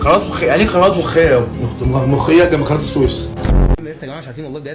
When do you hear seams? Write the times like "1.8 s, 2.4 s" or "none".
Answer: 3.8 s